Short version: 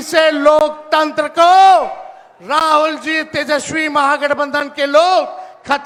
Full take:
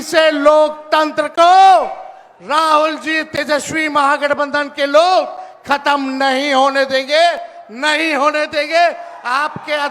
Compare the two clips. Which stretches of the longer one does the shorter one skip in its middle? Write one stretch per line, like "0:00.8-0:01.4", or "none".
none

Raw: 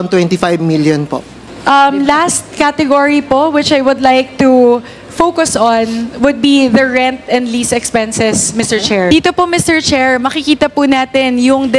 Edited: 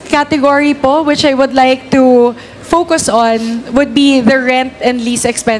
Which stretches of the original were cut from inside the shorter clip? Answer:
none

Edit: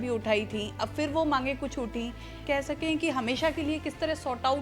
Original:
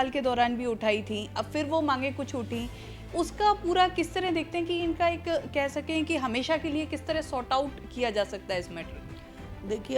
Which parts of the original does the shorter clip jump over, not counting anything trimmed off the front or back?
0:03.0-0:05.5

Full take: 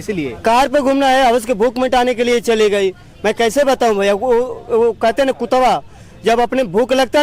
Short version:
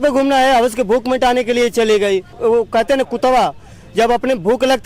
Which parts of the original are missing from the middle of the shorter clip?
0:03.0-0:04.6

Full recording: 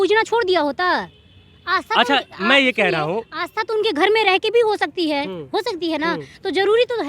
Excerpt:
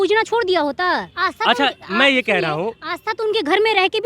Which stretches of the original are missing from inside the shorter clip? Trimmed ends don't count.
0:01.1-0:01.6

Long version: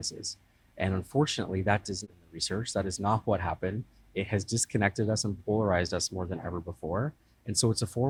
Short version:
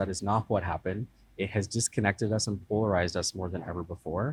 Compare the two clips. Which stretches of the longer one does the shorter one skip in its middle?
none

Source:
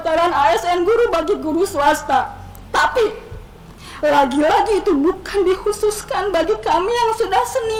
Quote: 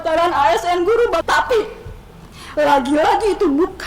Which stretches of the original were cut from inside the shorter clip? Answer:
0:01.2-0:02.7

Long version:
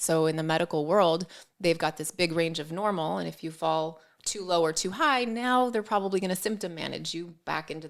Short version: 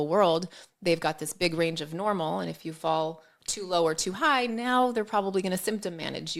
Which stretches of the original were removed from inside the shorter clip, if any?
none

